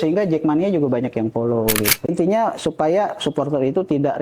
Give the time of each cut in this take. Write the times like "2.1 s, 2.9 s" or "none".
2.1 s